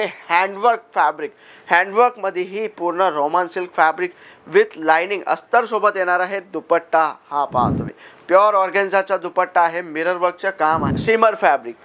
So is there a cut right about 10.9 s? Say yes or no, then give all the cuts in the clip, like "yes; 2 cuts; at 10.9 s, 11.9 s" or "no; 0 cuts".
yes; 1 cut; at 10.9 s